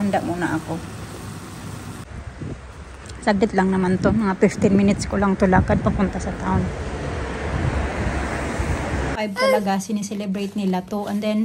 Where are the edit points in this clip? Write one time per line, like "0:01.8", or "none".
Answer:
0:02.0
0:09.2